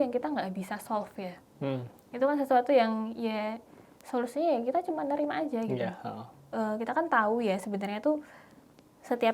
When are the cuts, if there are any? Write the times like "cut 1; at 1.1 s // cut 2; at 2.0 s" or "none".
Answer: cut 1; at 6.3 s